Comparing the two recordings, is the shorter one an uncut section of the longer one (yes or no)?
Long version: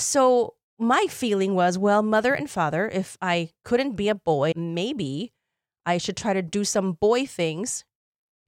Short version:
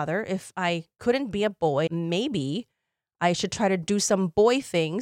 yes